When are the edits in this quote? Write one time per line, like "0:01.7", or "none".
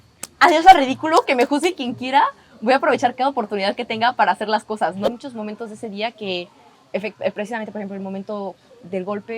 0:05.1

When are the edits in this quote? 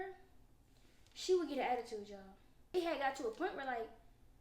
0:02.7

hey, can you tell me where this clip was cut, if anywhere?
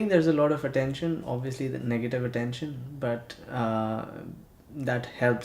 0:01.5

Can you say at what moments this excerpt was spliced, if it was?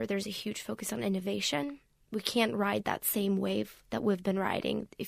none

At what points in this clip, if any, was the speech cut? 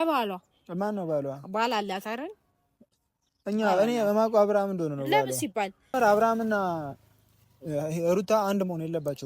0:05.9

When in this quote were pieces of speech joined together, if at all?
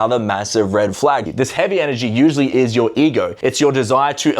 0:01.3
0:03.3

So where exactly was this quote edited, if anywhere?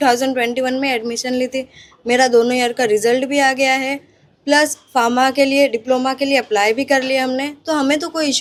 none

